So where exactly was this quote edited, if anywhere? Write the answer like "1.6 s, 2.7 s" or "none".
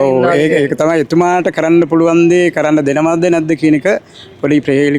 none